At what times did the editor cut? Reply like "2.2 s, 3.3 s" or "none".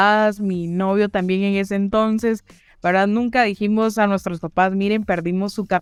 none